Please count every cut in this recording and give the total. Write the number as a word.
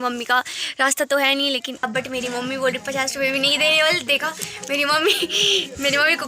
one